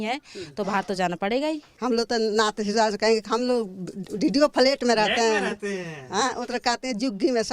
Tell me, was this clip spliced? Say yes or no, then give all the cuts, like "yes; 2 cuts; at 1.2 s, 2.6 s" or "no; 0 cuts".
yes; 1 cut; at 1.7 s